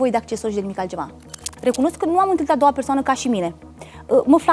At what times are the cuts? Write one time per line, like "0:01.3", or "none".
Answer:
0:01.5